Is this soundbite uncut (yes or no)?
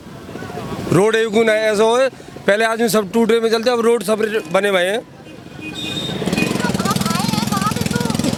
yes